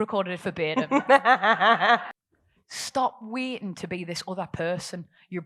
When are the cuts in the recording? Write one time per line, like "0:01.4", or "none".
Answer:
0:02.1